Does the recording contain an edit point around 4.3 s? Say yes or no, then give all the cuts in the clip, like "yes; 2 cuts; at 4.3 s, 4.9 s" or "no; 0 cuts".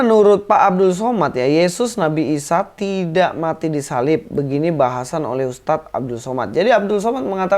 no; 0 cuts